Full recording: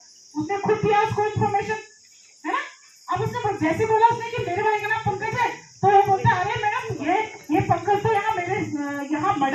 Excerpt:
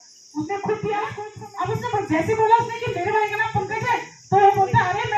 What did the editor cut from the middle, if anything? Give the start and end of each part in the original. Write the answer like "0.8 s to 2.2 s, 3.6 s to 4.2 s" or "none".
1.2 s to 2.8 s